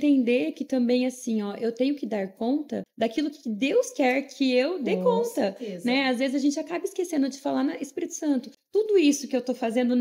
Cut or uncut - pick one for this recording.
cut